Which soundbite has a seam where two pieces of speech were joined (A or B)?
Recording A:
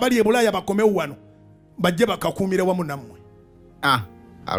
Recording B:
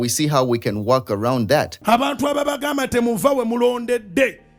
B